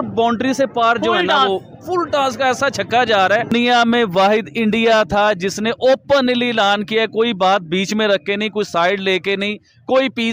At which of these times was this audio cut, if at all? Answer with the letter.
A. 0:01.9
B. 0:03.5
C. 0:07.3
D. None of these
B